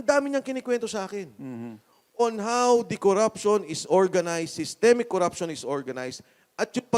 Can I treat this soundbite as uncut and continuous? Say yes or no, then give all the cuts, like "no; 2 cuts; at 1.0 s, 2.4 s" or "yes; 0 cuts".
yes; 0 cuts